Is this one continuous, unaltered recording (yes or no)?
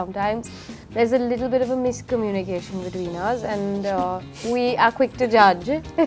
yes